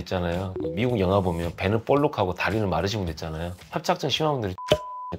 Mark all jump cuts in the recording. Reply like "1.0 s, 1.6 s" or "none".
none